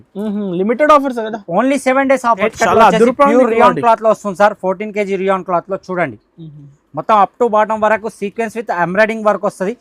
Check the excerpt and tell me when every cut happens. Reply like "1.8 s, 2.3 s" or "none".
2.4 s